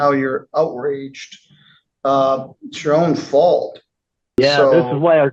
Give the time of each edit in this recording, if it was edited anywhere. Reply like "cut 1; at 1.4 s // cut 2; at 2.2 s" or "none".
cut 1; at 4.4 s

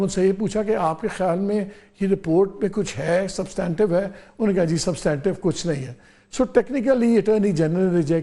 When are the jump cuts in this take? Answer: none

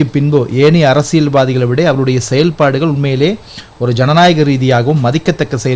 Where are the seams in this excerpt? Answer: none

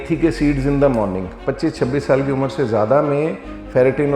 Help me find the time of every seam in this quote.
cut 1; at 1.4 s

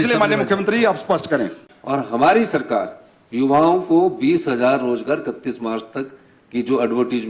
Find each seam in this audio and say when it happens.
cut 1; at 1.6 s

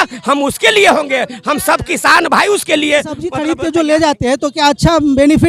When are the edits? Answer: cut 1; at 3.3 s

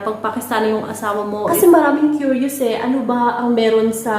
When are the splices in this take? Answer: cut 1; at 1.5 s

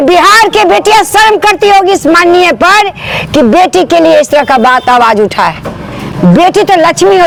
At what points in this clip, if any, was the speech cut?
none

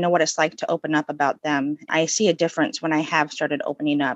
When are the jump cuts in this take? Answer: cut 1; at 1.9 s

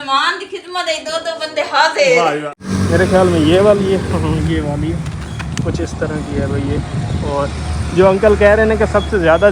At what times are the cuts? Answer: cut 1; at 2.6 s

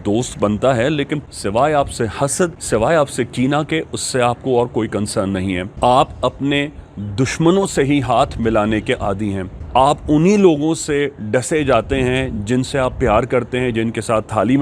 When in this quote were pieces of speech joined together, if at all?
cut 1; at 1.3 s // cut 2; at 2.6 s // cut 3; at 5.7 s // cut 4; at 9.5 s

